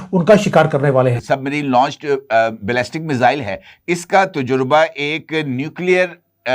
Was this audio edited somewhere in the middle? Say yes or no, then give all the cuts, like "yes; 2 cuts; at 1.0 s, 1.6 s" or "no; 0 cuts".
yes; 1 cut; at 1.2 s